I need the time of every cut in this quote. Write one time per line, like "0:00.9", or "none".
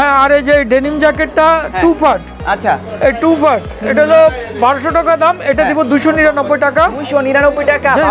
none